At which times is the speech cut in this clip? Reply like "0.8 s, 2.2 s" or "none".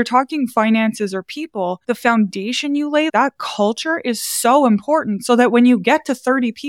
3.1 s